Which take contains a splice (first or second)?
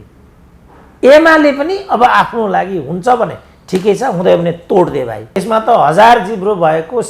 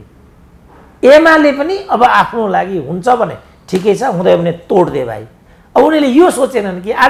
first